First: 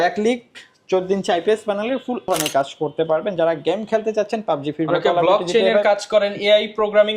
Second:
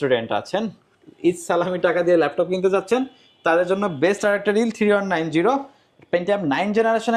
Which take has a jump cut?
first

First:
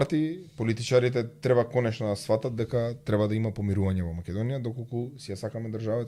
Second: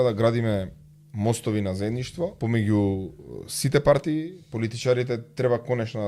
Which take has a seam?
second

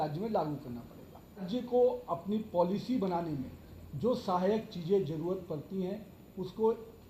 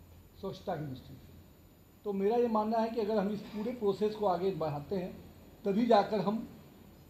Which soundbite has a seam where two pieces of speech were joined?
first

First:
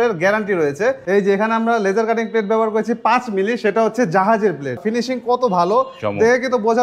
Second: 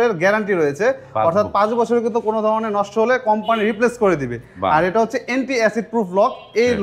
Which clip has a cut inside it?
first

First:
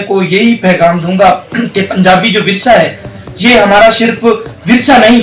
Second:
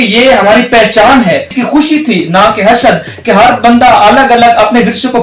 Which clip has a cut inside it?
second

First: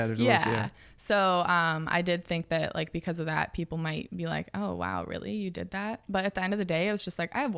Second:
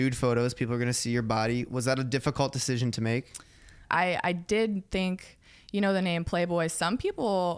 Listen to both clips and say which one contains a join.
second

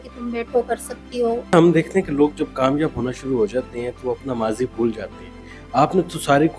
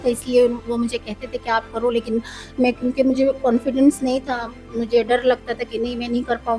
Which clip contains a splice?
first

